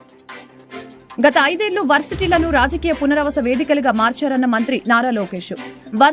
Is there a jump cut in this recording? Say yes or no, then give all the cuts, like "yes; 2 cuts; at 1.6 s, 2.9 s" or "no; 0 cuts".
yes; 1 cut; at 1.2 s